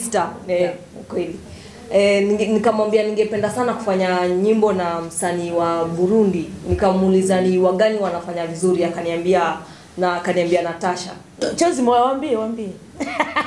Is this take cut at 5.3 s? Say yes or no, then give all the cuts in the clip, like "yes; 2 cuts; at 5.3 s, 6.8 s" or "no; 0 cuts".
no; 1 cut; at 11.4 s